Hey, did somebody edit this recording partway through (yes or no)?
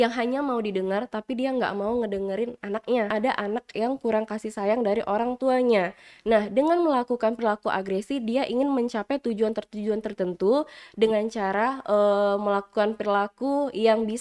yes